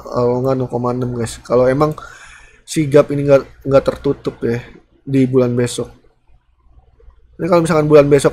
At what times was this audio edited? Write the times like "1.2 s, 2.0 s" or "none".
none

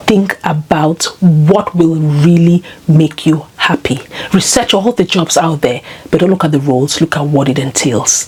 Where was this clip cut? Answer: none

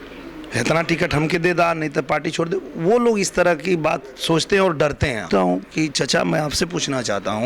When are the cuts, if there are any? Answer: 5.3 s

